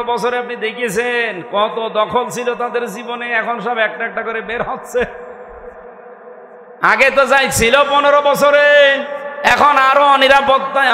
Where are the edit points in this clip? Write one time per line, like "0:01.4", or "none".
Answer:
0:06.8